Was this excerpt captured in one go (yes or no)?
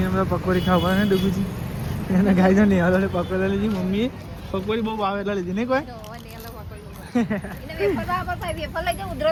yes